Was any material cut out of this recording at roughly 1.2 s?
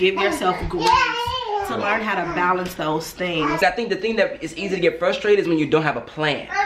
no; 1 cut; at 3.6 s

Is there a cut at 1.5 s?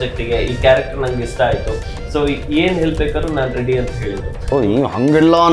no; 1 cut; at 4.5 s

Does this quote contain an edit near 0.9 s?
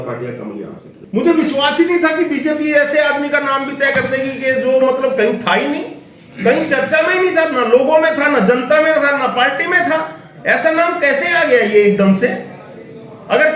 yes; 1 cut; at 0.9 s

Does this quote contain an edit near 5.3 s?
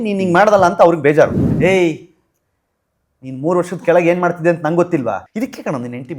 yes; 2 cuts; at 1.4 s, 5.3 s

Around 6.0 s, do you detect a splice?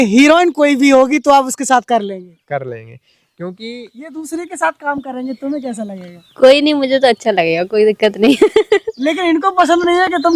no; 0 cuts

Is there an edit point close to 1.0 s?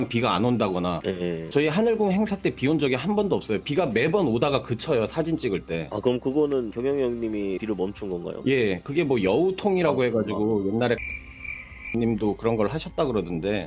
no; 0 cuts

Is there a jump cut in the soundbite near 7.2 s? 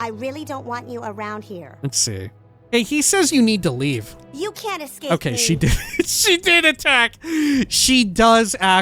no; 2 cuts; at 1.7 s, 2.5 s

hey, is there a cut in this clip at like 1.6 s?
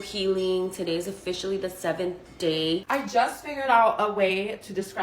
no; 1 cut; at 2.8 s

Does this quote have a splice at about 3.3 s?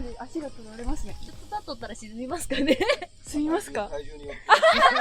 no; 1 cut; at 1.2 s

